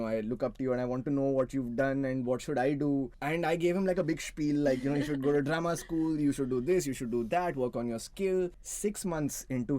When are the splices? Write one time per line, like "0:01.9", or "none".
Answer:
0:03.2
0:08.6